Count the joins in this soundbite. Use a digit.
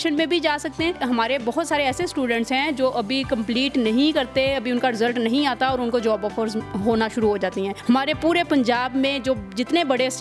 2